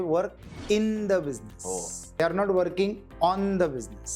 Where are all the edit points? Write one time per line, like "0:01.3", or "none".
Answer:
0:02.2